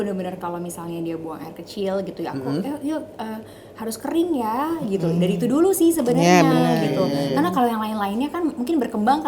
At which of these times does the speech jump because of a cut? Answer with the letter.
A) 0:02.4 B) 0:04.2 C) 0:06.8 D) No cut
D